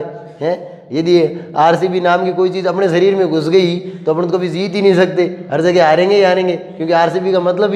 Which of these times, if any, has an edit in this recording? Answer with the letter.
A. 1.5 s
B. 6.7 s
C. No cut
C